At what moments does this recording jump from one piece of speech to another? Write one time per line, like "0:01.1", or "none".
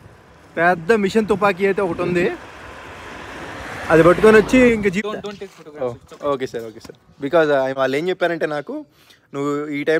0:05.0
0:07.7